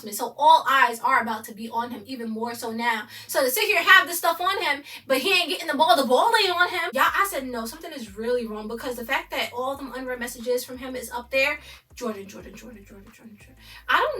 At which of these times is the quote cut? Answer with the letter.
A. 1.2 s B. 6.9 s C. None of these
B